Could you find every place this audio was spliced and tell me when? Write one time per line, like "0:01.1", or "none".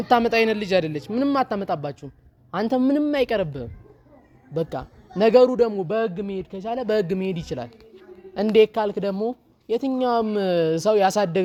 none